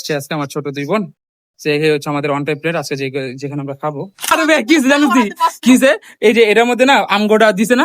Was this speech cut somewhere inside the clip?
yes; 1 cut; at 4.3 s

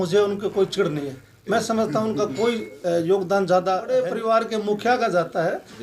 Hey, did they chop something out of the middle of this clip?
yes; 1 cut; at 4.0 s

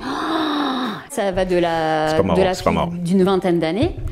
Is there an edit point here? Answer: yes; 1 cut; at 1.1 s

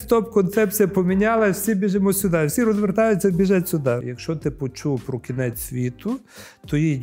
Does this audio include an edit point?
yes; 1 cut; at 4.1 s

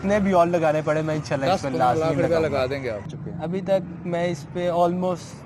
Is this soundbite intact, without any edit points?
no; 1 cut; at 3.1 s

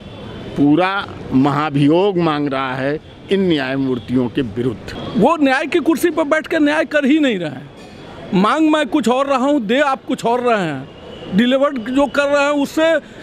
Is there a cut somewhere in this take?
yes; 1 cut; at 4.9 s

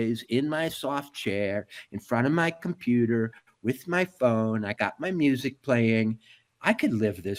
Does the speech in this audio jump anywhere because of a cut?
no; 0 cuts

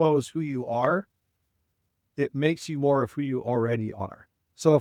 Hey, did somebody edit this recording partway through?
no; 0 cuts

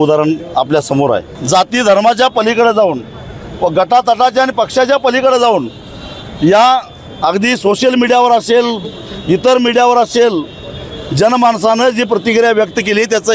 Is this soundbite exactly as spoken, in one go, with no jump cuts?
no; 1 cut; at 1.3 s

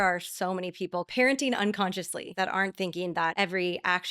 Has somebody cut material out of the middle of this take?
yes; 3 cuts; at 1.1 s, 2.2 s, 3.3 s

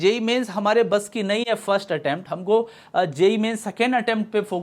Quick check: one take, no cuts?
yes; 0 cuts

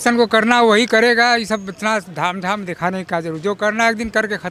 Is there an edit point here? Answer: no; 0 cuts

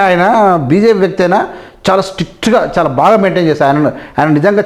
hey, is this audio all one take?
yes; 0 cuts

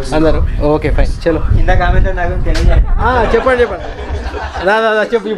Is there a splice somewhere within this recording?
no; 0 cuts

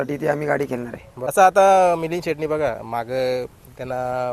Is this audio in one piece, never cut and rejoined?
no; 1 cut; at 1.3 s

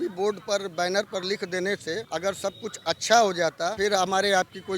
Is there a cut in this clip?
yes; 2 cuts; at 2.0 s, 3.7 s

